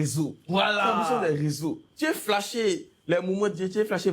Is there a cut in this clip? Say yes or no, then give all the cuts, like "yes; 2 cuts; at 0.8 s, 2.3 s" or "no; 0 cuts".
yes; 1 cut; at 1.9 s